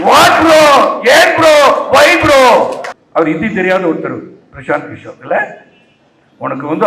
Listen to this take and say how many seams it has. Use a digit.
1